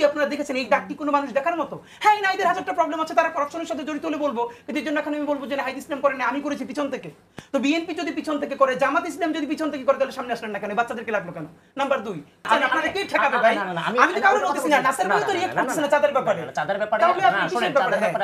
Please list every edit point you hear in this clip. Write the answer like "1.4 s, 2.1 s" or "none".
12.4 s